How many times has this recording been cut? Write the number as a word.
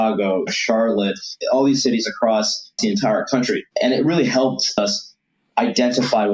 four